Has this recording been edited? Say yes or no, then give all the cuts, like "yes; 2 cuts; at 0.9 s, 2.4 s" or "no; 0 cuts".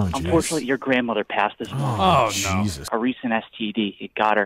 yes; 1 cut; at 2.9 s